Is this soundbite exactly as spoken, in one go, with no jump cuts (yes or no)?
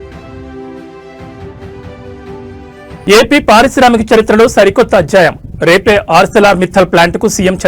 no